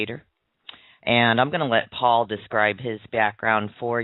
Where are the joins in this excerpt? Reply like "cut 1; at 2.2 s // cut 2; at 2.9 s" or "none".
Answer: cut 1; at 3.1 s

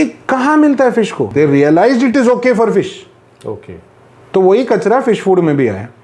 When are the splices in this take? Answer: cut 1; at 1.2 s

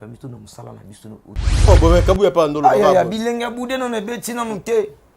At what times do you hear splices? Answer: cut 1; at 1.5 s

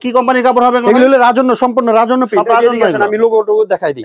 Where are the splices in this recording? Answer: none

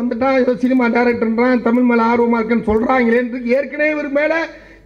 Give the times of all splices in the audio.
none

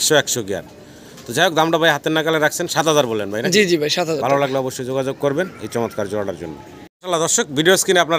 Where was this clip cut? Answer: none

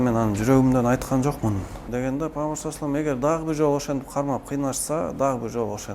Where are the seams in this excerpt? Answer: cut 1; at 1.9 s

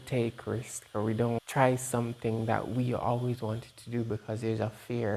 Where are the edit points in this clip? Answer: cut 1; at 1.4 s

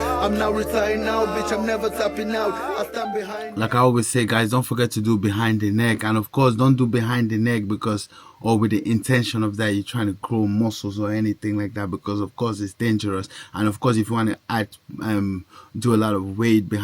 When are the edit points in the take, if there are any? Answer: cut 1; at 3.4 s

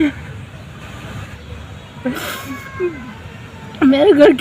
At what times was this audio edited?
cut 1; at 1.4 s

